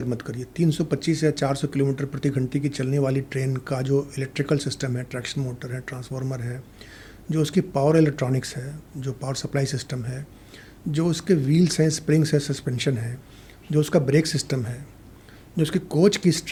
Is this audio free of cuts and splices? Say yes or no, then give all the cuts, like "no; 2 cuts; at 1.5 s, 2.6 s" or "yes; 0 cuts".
yes; 0 cuts